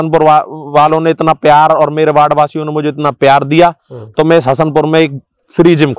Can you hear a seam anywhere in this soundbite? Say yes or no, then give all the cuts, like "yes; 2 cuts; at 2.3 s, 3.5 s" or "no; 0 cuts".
no; 0 cuts